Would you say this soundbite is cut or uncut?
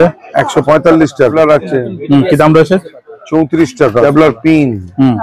cut